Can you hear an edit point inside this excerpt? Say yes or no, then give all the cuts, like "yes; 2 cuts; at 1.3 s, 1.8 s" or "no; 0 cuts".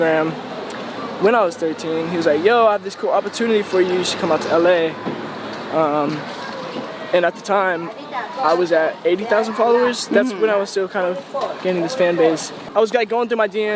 no; 0 cuts